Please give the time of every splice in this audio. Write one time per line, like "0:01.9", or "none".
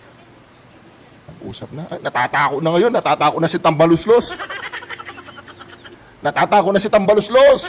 none